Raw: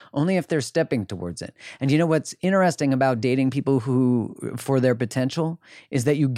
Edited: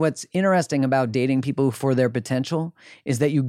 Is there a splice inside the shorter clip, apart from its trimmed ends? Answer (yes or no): yes